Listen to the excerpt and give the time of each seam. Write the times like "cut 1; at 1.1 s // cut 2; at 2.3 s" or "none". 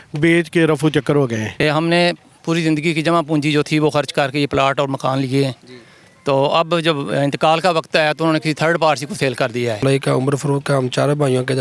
cut 1; at 1.6 s // cut 2; at 9.8 s